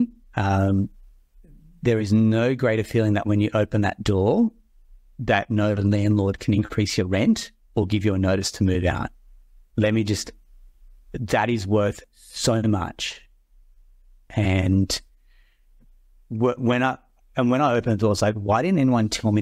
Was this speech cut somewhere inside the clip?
no; 0 cuts

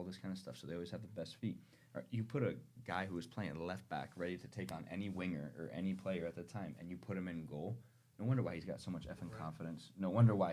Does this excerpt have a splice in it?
no; 0 cuts

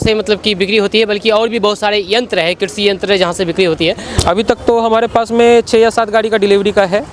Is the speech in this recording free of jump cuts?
no; 1 cut; at 4.2 s

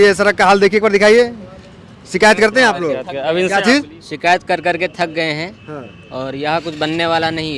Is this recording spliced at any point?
no; 0 cuts

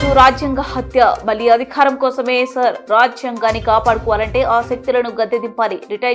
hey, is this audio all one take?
yes; 0 cuts

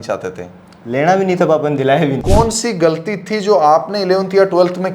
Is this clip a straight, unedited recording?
no; 1 cut; at 2.2 s

